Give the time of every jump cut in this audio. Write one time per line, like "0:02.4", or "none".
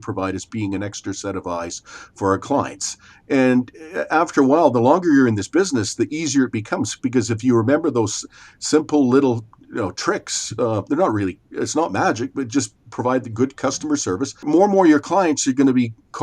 0:14.5